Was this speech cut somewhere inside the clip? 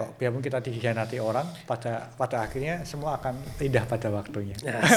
no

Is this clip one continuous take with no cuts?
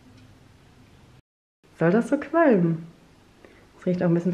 no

